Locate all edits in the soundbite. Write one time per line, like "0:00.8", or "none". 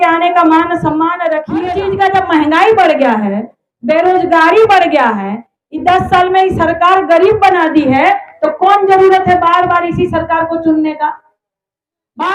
0:01.5